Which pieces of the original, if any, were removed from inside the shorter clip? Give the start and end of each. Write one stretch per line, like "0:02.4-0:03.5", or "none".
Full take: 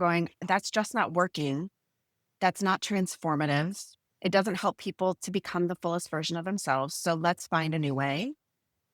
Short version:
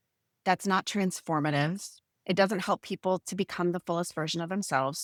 none